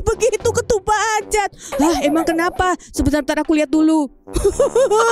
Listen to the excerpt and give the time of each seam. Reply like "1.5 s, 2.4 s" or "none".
4.2 s